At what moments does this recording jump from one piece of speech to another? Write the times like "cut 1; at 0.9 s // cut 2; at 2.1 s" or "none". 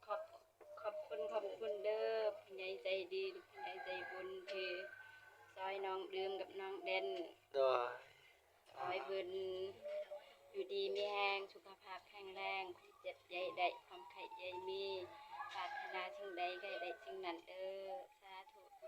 none